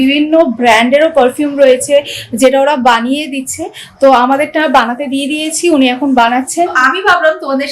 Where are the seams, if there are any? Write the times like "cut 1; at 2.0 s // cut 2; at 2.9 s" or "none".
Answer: cut 1; at 6.8 s